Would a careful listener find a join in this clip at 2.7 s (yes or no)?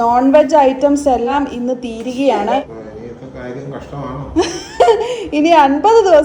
yes